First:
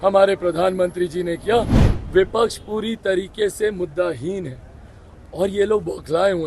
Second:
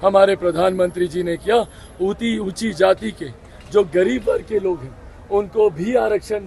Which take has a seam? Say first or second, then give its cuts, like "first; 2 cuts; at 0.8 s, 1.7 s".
first; 1 cut; at 1.8 s